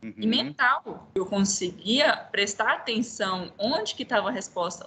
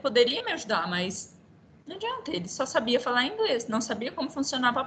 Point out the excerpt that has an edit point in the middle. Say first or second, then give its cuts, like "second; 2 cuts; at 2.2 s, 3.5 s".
first; 1 cut; at 1.0 s